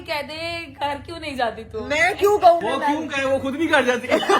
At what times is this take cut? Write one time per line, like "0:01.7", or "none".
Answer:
0:02.6